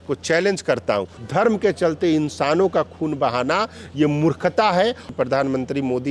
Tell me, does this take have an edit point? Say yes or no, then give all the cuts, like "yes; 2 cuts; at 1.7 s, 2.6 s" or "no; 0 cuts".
yes; 2 cuts; at 1.2 s, 5.1 s